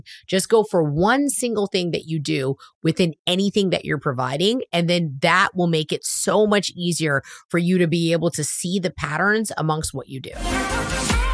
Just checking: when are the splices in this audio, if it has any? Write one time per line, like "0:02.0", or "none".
0:10.4